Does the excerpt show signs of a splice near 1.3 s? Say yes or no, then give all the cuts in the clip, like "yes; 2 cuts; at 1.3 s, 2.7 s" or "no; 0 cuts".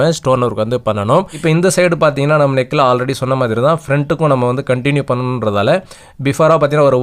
yes; 1 cut; at 1.3 s